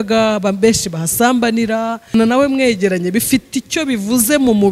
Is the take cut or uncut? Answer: cut